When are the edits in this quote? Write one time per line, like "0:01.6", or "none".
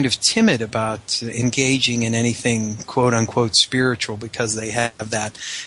none